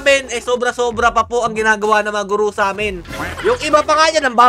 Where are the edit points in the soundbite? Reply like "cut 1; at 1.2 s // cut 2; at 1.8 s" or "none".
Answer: cut 1; at 3.0 s